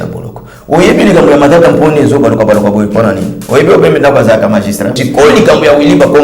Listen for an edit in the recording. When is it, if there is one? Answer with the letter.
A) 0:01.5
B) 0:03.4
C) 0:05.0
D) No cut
C